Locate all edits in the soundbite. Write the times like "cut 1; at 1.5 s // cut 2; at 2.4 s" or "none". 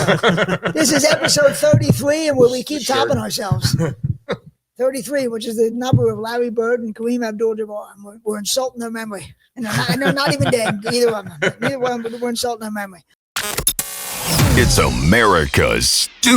cut 1; at 13.3 s

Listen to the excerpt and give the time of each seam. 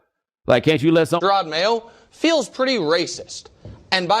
cut 1; at 1.2 s

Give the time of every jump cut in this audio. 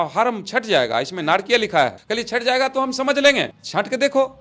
none

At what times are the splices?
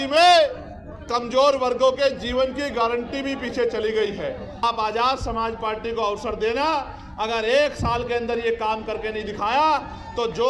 cut 1; at 4.6 s

